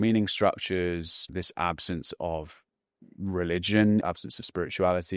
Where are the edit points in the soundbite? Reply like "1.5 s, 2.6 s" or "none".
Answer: 1.2 s, 4.0 s